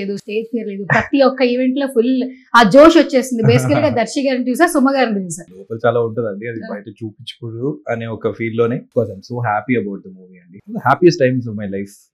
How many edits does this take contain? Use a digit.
3